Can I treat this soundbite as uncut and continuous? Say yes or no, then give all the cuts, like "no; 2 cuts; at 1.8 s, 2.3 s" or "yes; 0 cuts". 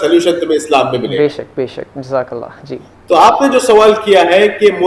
yes; 0 cuts